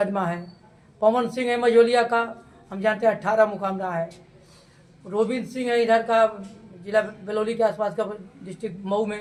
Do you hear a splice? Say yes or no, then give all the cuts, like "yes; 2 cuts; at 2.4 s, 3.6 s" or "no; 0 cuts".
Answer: no; 0 cuts